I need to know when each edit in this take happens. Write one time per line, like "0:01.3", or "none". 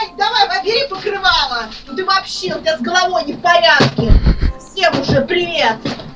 none

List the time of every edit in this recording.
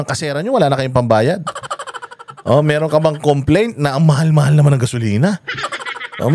none

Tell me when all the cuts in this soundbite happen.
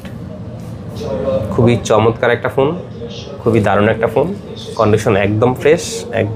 none

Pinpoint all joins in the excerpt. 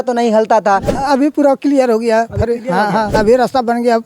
0:01.0
0:03.1

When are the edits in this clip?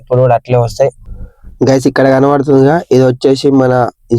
0:01.1

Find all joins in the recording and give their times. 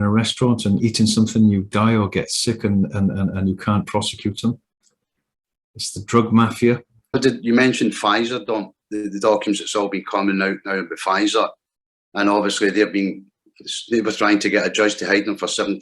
0:07.2

